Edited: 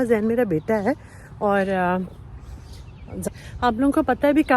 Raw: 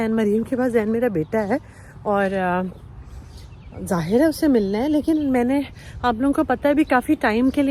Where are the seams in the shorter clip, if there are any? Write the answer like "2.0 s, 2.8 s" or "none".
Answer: 3.3 s